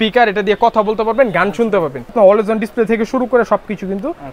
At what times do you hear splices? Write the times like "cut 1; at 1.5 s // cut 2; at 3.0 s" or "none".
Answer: cut 1; at 2.1 s